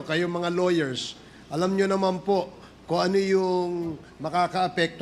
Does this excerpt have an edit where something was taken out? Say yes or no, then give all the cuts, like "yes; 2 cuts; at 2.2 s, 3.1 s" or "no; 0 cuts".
no; 0 cuts